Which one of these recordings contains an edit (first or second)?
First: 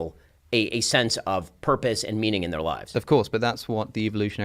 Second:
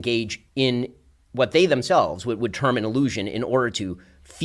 first